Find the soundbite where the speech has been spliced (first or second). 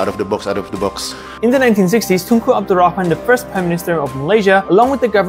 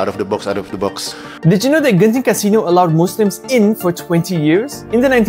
first